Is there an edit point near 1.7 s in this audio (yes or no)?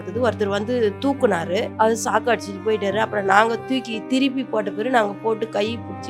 yes